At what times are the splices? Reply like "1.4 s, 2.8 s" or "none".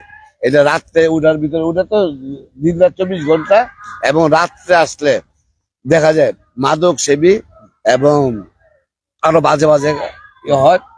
none